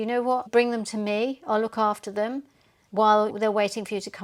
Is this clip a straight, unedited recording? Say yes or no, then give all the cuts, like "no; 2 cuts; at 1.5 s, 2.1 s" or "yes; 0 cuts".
yes; 0 cuts